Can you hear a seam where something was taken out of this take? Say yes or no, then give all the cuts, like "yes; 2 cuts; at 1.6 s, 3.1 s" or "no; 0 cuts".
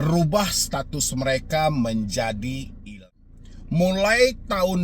yes; 1 cut; at 3.0 s